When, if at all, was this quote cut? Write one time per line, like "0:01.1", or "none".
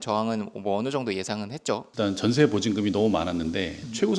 0:01.9